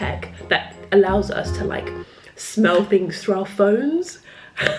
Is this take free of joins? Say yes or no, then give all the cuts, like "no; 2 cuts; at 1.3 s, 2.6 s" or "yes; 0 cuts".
yes; 0 cuts